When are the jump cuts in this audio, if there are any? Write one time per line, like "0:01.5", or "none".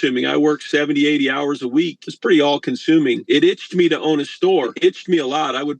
0:02.0
0:03.2
0:04.7